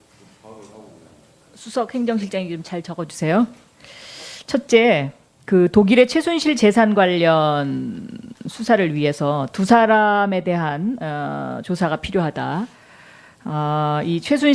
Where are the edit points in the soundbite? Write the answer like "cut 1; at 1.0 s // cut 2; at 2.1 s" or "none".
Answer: cut 1; at 9.7 s